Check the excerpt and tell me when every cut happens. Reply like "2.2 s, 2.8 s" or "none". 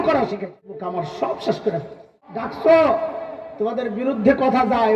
0.8 s, 2.5 s